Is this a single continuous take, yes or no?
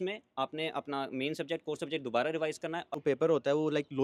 no